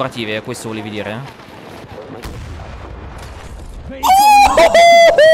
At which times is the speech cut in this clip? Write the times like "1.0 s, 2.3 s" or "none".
none